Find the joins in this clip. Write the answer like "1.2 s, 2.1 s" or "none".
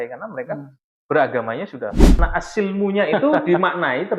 2.2 s